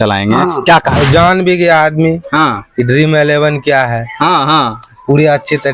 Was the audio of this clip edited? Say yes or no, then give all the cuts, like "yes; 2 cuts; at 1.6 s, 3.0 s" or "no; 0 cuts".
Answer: yes; 1 cut; at 1.0 s